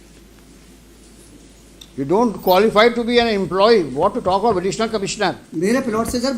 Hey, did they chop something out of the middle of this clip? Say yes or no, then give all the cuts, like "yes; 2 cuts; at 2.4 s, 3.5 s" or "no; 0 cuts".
yes; 1 cut; at 5.5 s